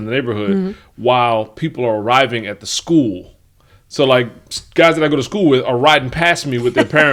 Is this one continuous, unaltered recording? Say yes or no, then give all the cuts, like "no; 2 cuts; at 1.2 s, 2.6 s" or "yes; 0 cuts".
yes; 0 cuts